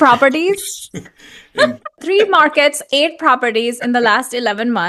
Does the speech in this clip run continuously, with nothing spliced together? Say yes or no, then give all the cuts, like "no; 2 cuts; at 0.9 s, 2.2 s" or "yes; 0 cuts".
no; 1 cut; at 2.0 s